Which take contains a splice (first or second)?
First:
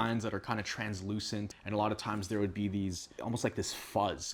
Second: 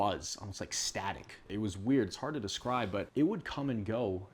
second